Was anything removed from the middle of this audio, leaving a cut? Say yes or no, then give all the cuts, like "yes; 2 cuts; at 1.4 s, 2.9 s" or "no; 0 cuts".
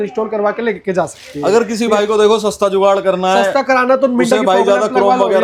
no; 0 cuts